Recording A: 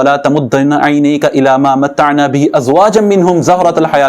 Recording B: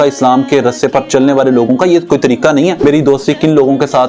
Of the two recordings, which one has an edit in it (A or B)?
B